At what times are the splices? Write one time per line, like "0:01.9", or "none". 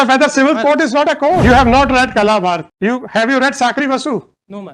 0:01.4
0:02.7